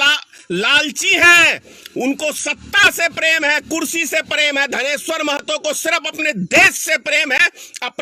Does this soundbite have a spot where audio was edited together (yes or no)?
no